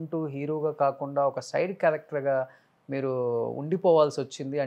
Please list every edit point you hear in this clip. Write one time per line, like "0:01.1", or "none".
none

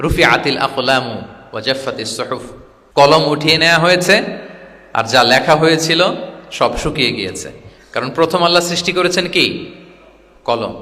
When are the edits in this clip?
0:03.0

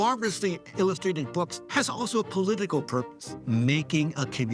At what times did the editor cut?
0:01.5
0:03.4

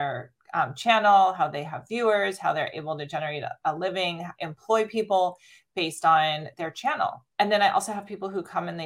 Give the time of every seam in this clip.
none

